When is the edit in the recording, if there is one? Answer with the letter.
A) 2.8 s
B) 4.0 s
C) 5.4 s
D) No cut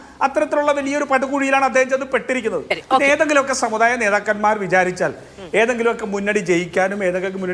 A